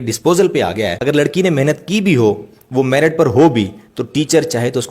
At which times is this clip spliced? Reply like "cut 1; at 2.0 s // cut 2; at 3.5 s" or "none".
cut 1; at 1.0 s